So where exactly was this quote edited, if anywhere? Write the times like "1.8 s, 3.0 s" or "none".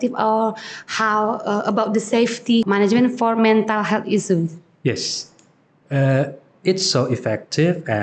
2.7 s